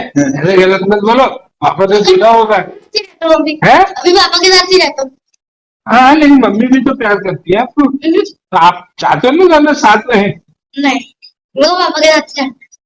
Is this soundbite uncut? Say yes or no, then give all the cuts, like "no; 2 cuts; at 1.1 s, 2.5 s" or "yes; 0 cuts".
yes; 0 cuts